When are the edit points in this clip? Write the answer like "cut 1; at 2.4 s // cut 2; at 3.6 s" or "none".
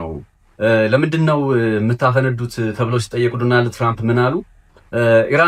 none